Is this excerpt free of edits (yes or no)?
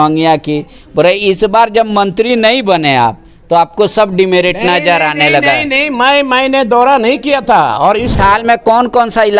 no